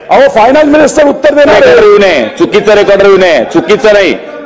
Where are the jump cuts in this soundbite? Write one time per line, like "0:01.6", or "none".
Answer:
none

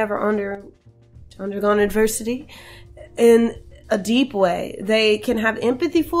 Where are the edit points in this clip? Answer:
0:01.3

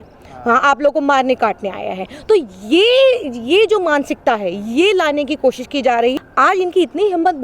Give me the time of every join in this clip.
0:06.1

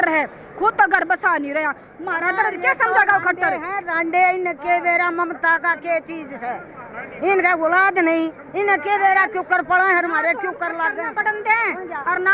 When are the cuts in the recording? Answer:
none

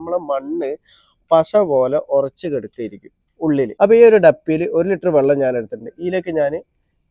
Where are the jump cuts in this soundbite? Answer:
0:03.7

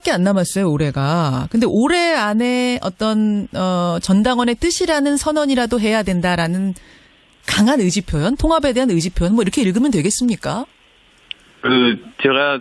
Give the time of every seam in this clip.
0:02.0

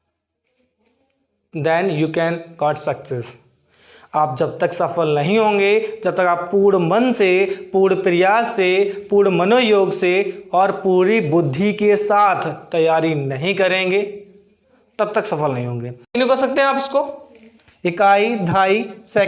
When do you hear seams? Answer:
0:16.2

